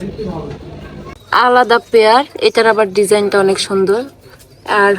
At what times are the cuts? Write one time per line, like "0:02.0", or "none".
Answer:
0:01.1